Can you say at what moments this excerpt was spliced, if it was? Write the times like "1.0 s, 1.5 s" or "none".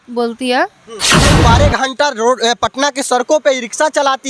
1.3 s